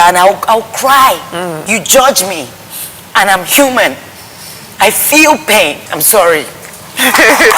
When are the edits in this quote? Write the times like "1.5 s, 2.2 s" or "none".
1.6 s, 5.9 s

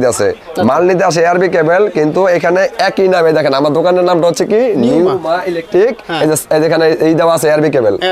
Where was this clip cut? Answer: none

